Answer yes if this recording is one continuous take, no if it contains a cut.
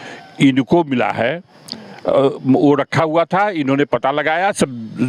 yes